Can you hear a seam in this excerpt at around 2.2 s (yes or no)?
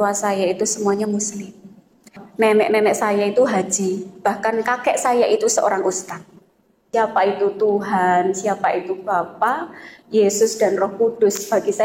yes